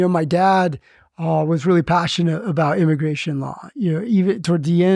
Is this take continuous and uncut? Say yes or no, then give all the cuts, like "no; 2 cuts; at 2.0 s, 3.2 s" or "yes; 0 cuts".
yes; 0 cuts